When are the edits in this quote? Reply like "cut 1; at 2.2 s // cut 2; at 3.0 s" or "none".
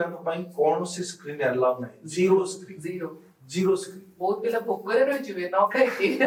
none

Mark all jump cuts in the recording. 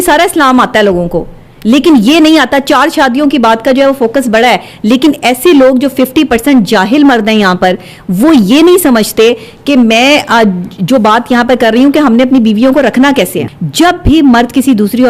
cut 1; at 13.5 s

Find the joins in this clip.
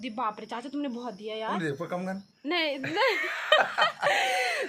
none

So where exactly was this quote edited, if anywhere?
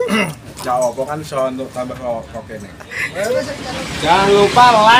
cut 1; at 3.6 s

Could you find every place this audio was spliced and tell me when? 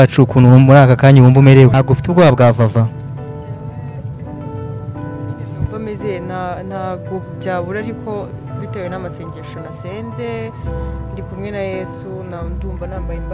none

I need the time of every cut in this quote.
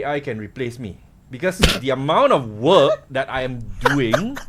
none

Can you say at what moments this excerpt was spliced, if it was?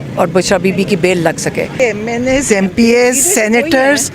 cut 1; at 1.8 s

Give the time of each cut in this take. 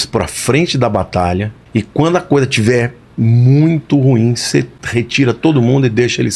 cut 1; at 1.6 s // cut 2; at 4.8 s

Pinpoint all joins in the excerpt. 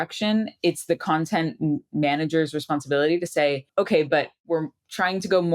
cut 1; at 3.6 s // cut 2; at 4.4 s

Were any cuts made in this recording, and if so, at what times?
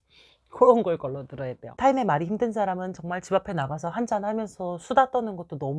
cut 1; at 1.6 s

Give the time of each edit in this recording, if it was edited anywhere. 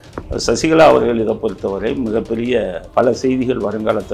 cut 1; at 2.8 s

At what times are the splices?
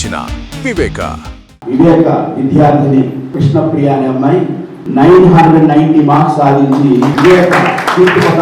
none

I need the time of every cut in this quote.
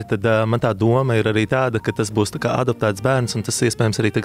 none

